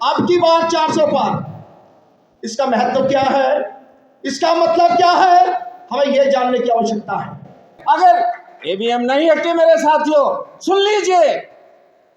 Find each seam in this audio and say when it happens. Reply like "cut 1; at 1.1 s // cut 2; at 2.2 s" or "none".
cut 1; at 7.8 s